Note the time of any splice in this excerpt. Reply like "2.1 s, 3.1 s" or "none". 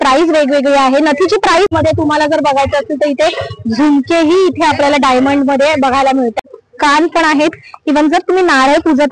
1.7 s, 6.4 s